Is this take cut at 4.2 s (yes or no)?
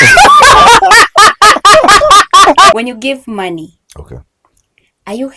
no